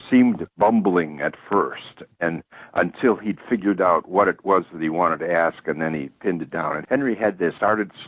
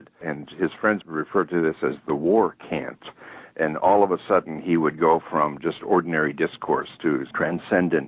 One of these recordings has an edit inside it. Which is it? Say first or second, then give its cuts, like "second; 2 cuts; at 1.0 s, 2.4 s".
second; 1 cut; at 1.1 s